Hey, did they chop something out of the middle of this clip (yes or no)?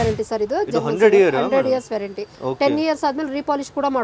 no